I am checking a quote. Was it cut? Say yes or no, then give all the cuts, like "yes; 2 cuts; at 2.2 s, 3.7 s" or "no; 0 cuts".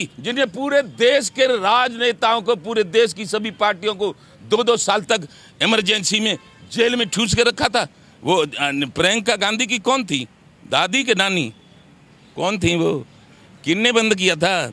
no; 0 cuts